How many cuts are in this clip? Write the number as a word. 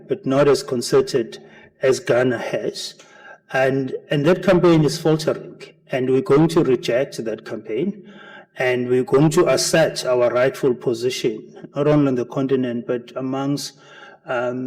one